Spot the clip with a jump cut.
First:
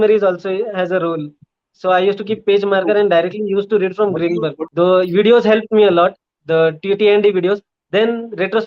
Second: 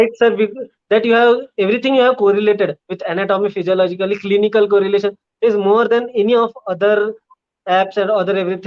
first; 1 cut; at 4.6 s

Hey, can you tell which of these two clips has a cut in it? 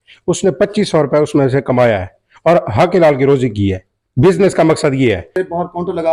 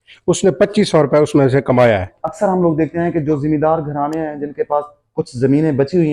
second; 1 cut; at 2.2 s

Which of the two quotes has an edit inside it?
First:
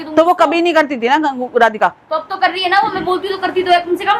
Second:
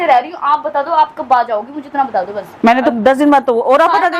second; 1 cut; at 2.9 s

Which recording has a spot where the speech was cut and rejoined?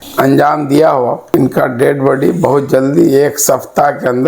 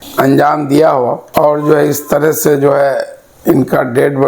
first; 1 cut; at 1.2 s

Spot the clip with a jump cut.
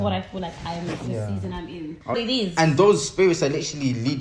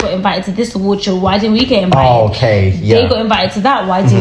first; 1 cut; at 2.2 s

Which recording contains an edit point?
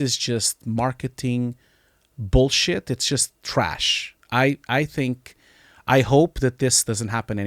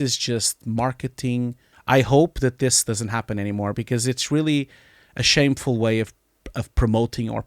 second; 1 cut; at 1.7 s

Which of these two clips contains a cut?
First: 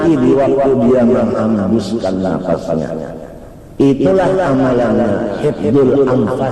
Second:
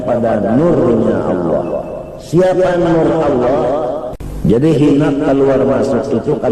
second; 1 cut; at 4.1 s

